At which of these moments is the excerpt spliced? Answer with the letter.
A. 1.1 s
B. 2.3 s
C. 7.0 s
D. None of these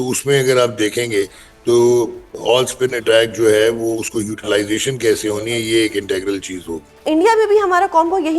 C